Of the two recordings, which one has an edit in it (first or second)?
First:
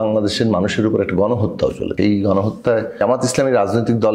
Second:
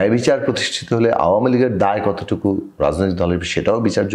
first